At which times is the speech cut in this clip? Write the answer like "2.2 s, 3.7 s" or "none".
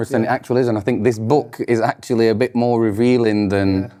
none